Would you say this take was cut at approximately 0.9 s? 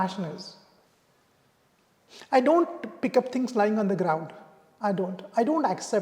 yes; 1 cut; at 0.9 s

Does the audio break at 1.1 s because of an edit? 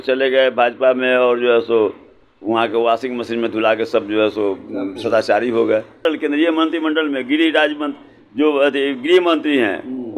no; 1 cut; at 6.0 s

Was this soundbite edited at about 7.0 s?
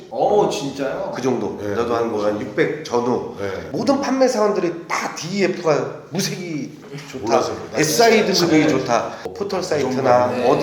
no; 1 cut; at 9.2 s

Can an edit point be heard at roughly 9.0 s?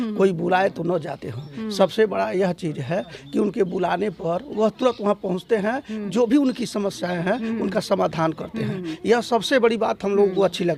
no; 0 cuts

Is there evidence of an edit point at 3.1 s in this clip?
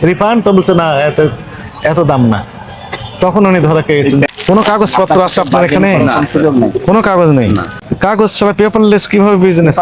no; 2 cuts; at 4.3 s, 7.8 s

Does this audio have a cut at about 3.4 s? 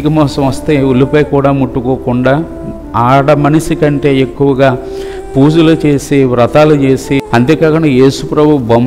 no; 1 cut; at 7.2 s

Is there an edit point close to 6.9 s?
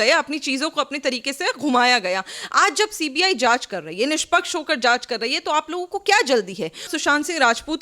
yes; 1 cut; at 6.9 s

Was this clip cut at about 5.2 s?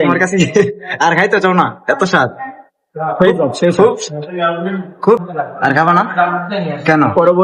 yes; 1 cut; at 5.2 s

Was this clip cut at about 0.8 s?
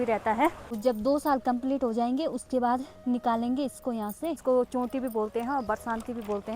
yes; 2 cuts; at 0.8 s, 4.4 s

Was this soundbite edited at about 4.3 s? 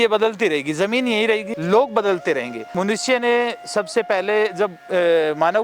no; 2 cuts; at 1.5 s, 2.7 s

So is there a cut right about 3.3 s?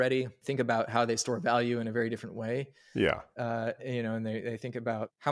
no; 0 cuts

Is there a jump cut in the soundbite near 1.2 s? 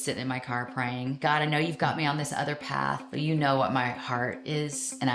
yes; 2 cuts; at 1.2 s, 3.1 s

